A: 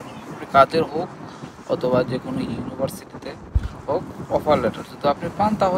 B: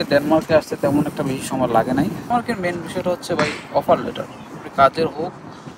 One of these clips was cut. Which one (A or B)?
B